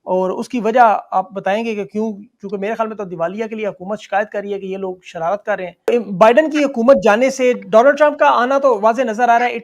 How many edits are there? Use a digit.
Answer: 1